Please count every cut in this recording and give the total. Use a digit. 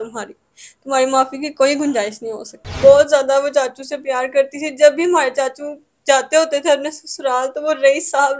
1